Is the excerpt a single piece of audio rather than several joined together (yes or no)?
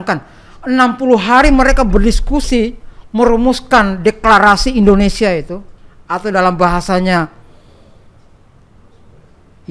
yes